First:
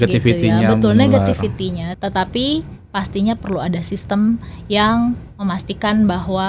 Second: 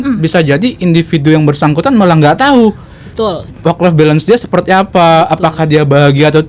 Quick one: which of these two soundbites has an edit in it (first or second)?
first